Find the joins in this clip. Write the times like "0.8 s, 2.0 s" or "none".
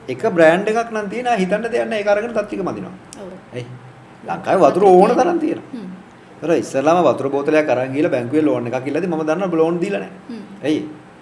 3.4 s

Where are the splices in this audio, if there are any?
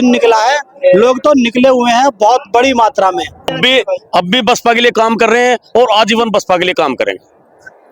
3.6 s

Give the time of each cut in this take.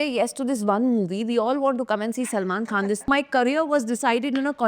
3.1 s

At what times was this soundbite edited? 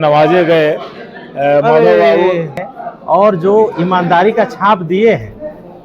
2.7 s

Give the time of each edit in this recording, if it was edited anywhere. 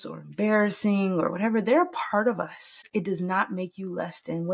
2.9 s

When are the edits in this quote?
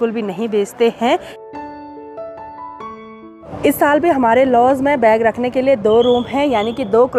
none

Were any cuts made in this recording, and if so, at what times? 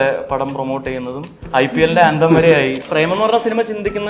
1.4 s, 2.8 s

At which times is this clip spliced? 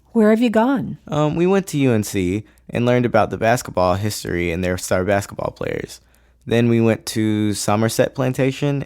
1.0 s

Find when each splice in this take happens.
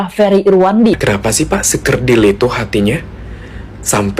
1.0 s

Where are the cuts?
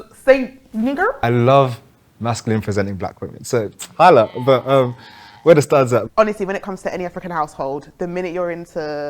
1.2 s, 6.1 s

